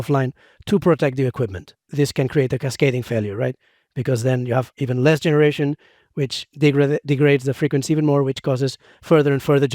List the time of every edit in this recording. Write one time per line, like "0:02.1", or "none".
0:01.8